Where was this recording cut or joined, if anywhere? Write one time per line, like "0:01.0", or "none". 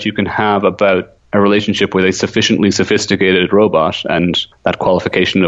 0:01.2
0:04.5